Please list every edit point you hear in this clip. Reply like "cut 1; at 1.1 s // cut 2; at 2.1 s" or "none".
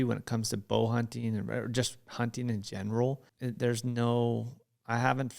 cut 1; at 3.3 s